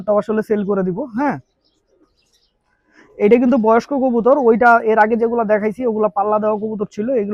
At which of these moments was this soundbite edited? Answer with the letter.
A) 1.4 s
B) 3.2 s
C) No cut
C